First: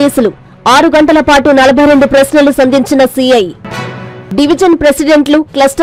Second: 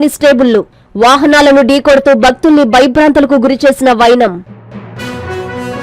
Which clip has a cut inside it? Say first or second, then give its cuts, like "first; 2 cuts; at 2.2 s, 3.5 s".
second; 1 cut; at 4.5 s